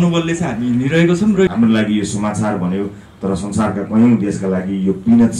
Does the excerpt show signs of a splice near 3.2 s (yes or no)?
no